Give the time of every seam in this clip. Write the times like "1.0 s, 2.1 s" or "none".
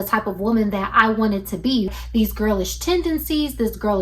2.0 s